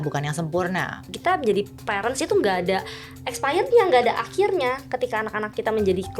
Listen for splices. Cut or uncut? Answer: cut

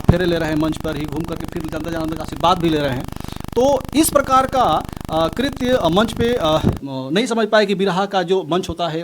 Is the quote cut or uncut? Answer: cut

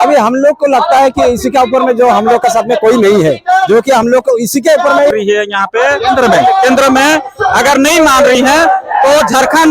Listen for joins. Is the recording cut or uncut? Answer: cut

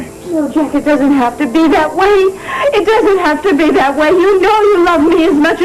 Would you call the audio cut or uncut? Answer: cut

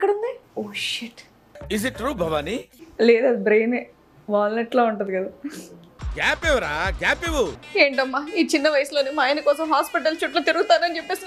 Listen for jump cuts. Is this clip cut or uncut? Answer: cut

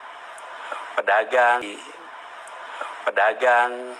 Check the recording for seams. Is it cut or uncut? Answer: uncut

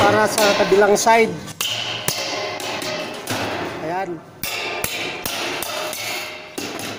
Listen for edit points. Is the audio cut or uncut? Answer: uncut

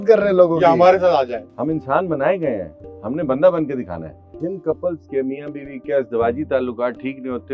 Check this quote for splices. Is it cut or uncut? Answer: cut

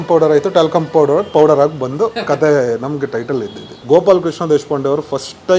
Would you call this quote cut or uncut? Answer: cut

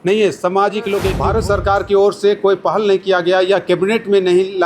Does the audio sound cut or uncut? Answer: cut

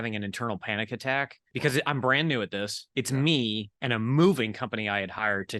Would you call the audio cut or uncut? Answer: cut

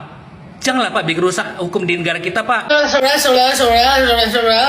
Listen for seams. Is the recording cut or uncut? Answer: cut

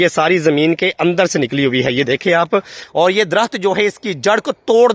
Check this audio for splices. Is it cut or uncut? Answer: cut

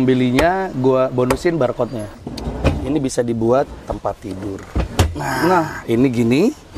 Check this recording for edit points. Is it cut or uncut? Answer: cut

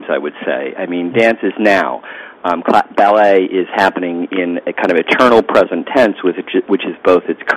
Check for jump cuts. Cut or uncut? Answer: uncut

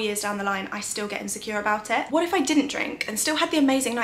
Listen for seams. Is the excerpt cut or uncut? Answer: cut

